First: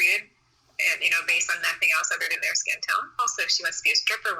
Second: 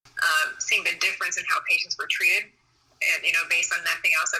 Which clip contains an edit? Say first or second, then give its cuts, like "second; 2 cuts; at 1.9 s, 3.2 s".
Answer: first; 1 cut; at 3.2 s